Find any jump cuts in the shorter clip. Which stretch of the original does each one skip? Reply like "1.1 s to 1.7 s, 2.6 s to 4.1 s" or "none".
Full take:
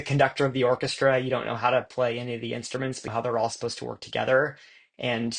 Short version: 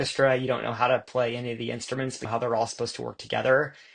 none